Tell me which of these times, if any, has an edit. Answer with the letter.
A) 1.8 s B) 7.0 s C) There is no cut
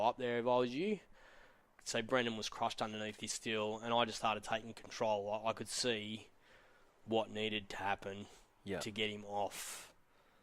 A